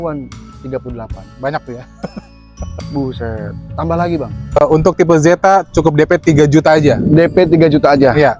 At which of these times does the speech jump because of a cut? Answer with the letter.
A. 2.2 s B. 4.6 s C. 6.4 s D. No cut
B